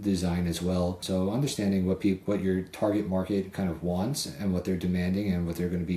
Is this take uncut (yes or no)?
no